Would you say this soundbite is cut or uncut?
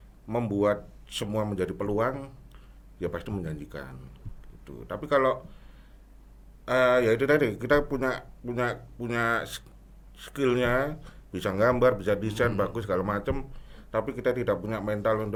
uncut